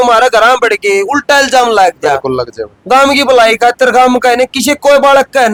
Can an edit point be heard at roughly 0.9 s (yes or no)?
no